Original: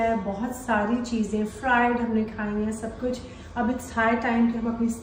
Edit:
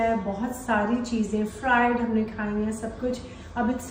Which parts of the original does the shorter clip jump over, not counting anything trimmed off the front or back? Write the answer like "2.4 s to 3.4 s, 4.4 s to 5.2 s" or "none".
none